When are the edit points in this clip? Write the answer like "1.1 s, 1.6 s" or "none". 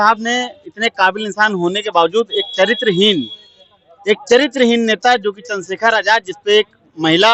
none